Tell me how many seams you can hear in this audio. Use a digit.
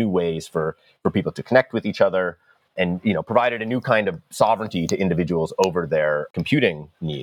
2